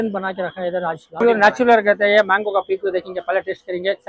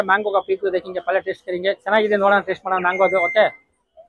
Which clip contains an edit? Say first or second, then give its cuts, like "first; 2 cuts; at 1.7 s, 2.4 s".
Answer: first; 1 cut; at 1.1 s